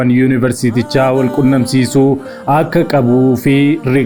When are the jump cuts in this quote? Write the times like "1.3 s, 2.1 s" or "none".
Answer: none